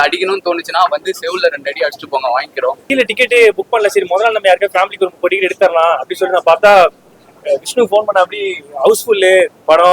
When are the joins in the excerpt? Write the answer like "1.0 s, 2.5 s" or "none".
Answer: 2.8 s